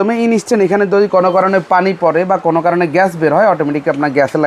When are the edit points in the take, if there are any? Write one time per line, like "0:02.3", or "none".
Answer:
none